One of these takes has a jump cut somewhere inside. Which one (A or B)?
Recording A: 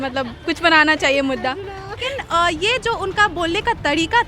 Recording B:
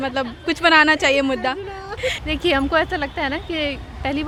A